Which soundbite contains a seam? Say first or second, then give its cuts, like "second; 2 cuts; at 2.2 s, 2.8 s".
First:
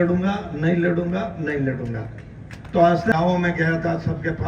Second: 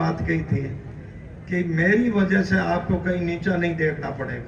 first; 1 cut; at 3.1 s